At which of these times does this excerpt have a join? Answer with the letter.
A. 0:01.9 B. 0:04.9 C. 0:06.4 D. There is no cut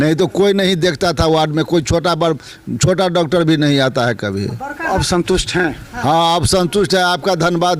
B